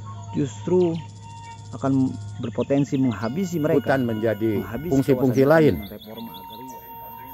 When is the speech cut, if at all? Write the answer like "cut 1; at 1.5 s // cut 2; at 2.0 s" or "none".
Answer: cut 1; at 4.0 s